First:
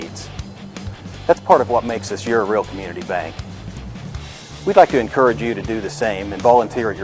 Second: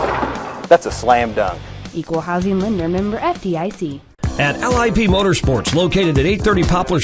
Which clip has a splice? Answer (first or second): second